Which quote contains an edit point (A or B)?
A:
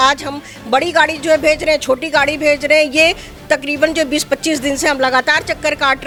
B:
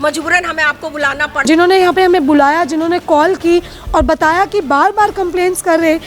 B